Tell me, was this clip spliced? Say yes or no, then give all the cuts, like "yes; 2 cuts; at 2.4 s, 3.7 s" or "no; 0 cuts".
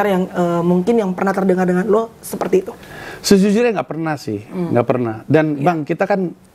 no; 0 cuts